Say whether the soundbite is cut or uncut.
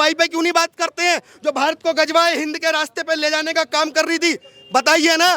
uncut